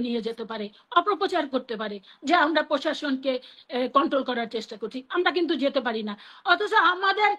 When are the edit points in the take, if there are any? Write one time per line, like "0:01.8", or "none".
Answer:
none